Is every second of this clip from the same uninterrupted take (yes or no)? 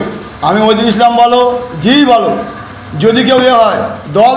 yes